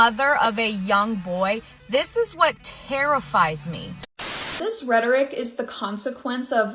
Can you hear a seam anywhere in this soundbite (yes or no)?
yes